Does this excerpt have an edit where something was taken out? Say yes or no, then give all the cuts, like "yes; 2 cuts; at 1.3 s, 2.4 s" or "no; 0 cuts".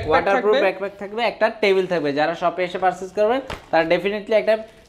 no; 0 cuts